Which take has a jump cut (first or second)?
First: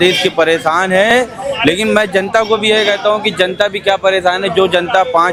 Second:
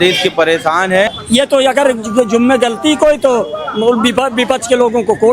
second